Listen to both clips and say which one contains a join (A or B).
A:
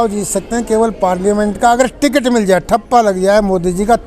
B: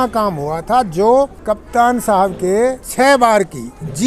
B